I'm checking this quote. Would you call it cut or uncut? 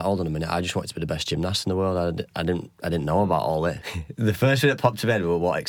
cut